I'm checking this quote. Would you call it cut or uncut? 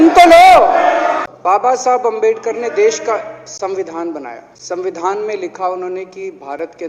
cut